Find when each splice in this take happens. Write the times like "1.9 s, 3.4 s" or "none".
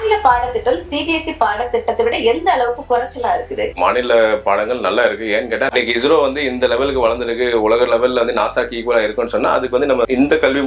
3.7 s, 5.7 s